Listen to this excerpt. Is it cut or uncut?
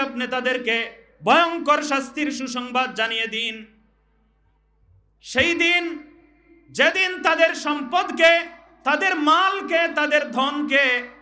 uncut